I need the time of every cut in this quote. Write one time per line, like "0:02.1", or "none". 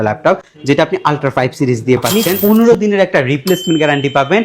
0:02.1